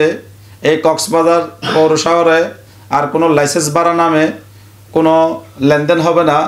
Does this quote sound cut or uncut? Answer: uncut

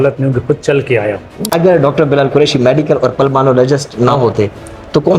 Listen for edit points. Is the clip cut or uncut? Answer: cut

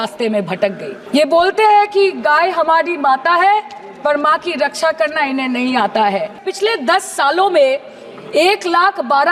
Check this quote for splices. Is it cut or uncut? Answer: cut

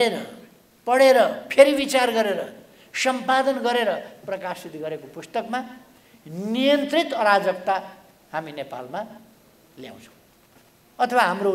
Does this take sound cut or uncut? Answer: uncut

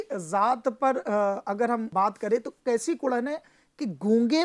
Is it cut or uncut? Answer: cut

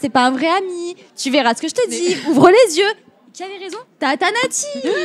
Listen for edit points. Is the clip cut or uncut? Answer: uncut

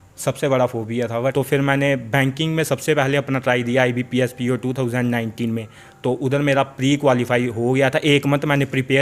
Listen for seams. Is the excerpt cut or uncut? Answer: cut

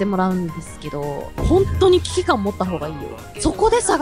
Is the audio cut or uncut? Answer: cut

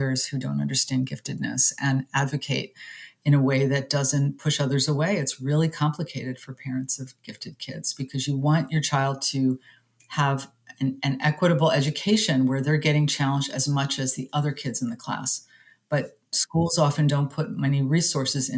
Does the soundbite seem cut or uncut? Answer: uncut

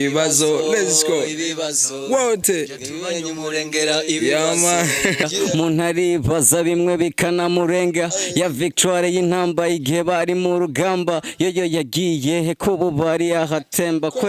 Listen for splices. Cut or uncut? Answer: cut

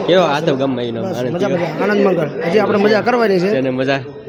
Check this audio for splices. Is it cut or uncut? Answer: uncut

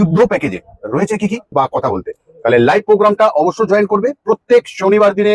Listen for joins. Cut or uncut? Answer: cut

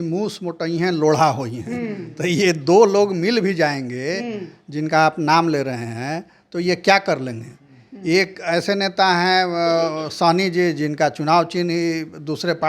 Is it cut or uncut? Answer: uncut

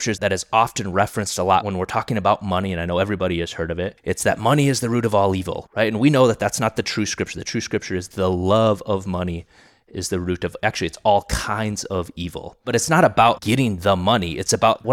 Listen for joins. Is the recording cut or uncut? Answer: cut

